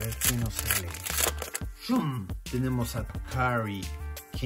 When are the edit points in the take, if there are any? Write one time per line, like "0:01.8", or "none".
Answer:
0:03.1